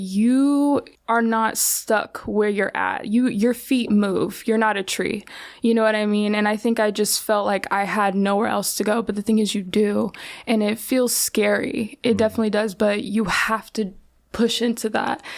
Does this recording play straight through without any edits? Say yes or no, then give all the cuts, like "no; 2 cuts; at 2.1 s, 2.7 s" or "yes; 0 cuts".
no; 1 cut; at 0.9 s